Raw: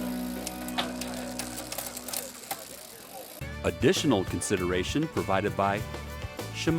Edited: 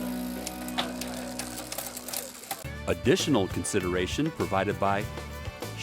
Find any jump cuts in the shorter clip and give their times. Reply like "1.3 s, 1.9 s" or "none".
2.6 s